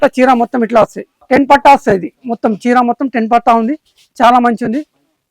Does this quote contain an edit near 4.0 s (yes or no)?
no